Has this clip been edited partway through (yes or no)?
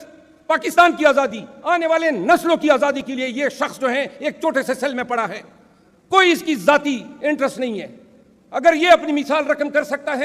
no